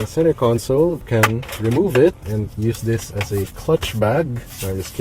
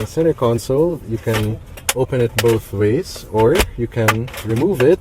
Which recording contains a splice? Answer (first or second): first